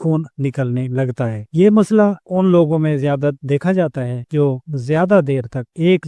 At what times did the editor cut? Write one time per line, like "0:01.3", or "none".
none